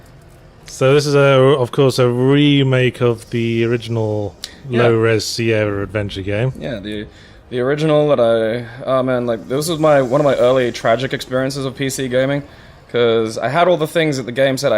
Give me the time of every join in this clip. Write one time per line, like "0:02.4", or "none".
0:12.0